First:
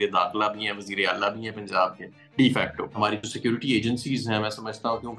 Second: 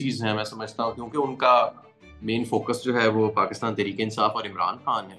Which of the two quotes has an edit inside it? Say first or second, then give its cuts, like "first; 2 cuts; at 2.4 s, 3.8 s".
first; 1 cut; at 3.0 s